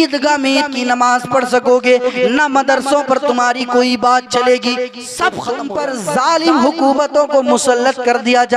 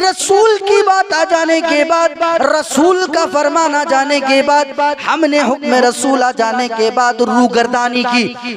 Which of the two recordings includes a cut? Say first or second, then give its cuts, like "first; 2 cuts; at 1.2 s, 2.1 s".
first; 1 cut; at 5.5 s